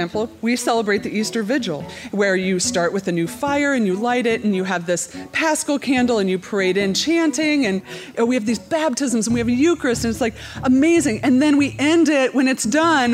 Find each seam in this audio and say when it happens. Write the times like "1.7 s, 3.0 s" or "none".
1.9 s, 8.1 s